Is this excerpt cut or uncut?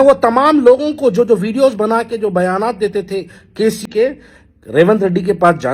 cut